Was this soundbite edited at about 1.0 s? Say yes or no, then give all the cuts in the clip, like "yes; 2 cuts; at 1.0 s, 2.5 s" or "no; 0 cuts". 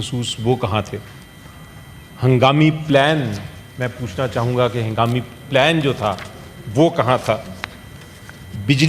no; 0 cuts